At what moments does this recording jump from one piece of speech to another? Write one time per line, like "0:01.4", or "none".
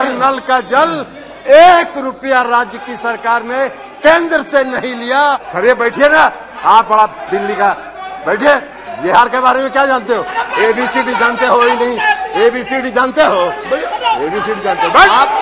0:05.5